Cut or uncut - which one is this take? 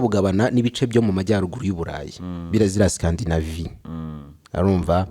uncut